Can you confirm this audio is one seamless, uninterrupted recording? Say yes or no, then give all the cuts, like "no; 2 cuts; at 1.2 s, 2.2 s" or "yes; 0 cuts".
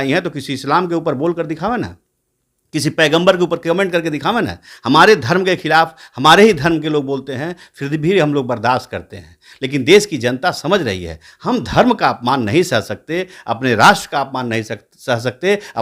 yes; 0 cuts